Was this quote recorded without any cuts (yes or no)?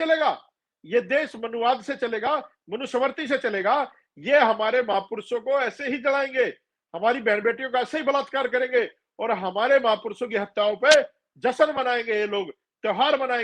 yes